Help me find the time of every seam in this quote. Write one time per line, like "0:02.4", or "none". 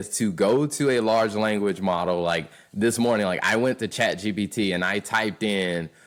none